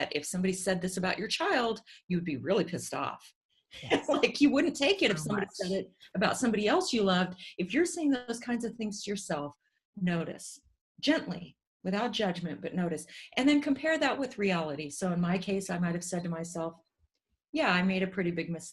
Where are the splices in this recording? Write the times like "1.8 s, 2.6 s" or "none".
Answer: none